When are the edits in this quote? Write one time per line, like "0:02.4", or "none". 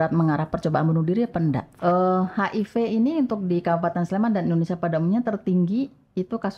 0:01.7